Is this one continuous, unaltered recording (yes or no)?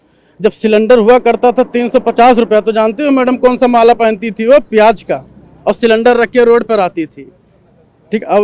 yes